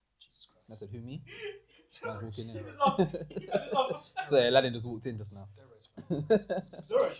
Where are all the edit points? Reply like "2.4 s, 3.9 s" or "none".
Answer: none